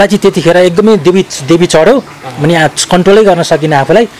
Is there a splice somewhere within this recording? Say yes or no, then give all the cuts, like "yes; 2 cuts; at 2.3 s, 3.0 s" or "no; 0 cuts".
no; 0 cuts